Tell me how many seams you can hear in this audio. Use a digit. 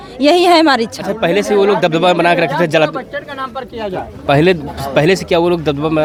0